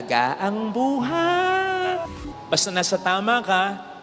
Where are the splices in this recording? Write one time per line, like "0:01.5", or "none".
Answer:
0:02.1